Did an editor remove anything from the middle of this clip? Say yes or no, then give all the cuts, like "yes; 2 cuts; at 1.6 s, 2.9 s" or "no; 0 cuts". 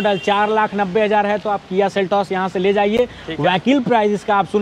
no; 0 cuts